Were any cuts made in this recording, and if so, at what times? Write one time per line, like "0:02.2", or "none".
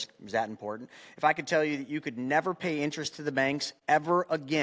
0:03.7